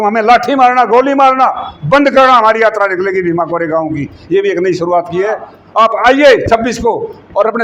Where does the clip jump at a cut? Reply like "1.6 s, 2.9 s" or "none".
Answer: 5.6 s